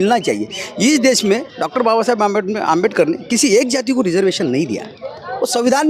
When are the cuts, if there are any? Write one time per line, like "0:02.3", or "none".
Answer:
none